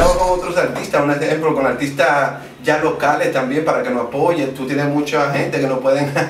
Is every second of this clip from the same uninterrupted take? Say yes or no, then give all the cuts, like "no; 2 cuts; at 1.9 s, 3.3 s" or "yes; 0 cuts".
yes; 0 cuts